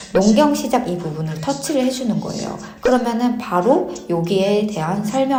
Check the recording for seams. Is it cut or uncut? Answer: uncut